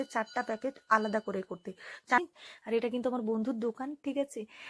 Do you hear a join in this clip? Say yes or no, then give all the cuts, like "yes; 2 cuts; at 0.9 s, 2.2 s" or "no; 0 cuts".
yes; 1 cut; at 2.2 s